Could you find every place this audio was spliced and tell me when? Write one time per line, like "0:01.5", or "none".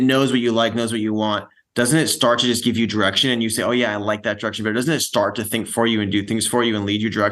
none